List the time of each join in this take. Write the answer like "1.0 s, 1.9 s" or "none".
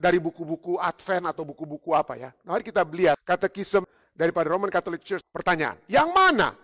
3.6 s, 5.2 s